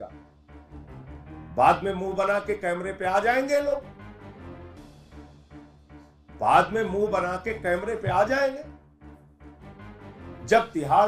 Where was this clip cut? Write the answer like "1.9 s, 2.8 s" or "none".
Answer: none